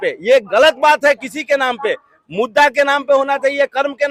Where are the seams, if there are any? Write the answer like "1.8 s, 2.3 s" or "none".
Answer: none

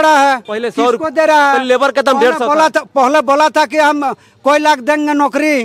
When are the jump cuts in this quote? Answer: none

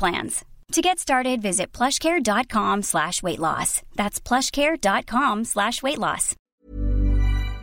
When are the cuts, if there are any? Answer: 6.4 s

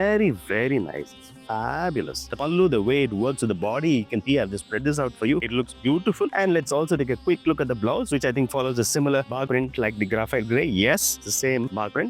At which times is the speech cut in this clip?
none

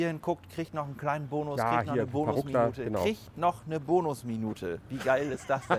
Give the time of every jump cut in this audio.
none

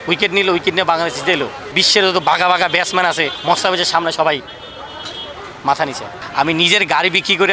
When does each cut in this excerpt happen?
1.8 s, 3.3 s, 6.2 s

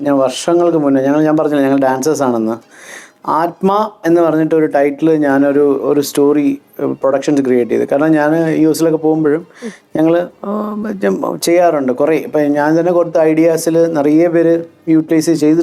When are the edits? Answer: none

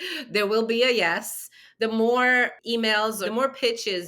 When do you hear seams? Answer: 3.0 s

